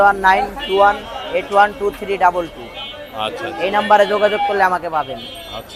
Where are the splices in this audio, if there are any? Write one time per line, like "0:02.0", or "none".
none